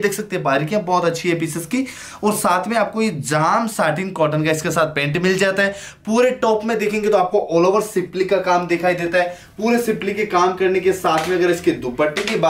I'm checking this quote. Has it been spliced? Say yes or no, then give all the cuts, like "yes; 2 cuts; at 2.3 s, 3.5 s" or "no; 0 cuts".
no; 0 cuts